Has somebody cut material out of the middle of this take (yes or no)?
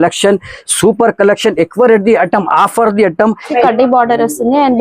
yes